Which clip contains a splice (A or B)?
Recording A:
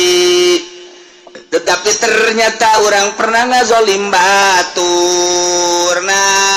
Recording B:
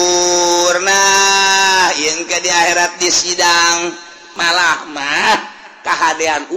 B